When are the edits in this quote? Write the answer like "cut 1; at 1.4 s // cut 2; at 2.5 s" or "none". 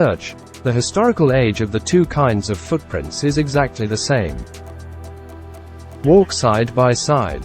cut 1; at 4.4 s // cut 2; at 5.8 s